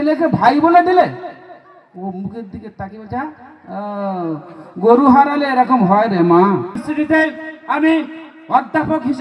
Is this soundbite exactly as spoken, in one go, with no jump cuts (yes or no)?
no